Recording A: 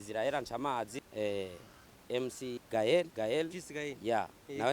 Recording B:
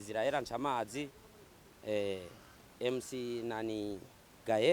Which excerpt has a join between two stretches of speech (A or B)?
A